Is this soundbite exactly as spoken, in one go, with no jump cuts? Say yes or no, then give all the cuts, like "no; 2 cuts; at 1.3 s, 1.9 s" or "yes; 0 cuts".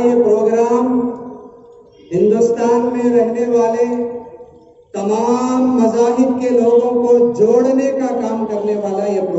yes; 0 cuts